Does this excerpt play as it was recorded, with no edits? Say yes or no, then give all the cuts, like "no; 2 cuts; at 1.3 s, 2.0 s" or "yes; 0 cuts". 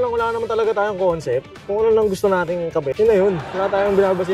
yes; 0 cuts